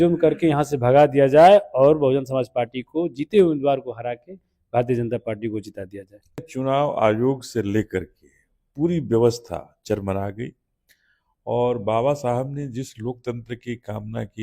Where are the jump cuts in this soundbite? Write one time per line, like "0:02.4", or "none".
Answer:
0:06.5